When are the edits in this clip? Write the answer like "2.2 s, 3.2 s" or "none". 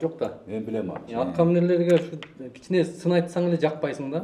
1.0 s